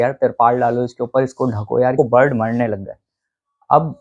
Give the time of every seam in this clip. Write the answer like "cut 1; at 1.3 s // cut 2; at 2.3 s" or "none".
cut 1; at 2.0 s